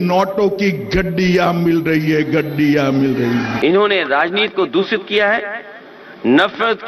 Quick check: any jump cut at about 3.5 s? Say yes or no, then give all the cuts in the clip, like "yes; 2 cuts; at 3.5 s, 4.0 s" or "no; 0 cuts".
yes; 1 cut; at 3.5 s